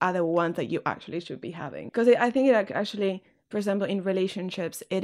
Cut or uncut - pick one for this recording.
cut